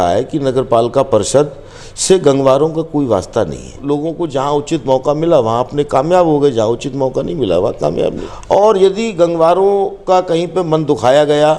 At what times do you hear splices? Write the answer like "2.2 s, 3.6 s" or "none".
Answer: 3.8 s, 8.2 s